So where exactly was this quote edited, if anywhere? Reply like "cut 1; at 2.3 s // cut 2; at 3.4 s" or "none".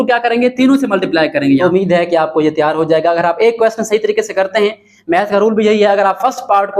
cut 1; at 1.6 s